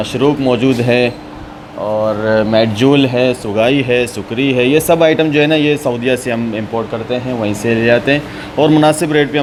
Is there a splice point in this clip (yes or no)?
no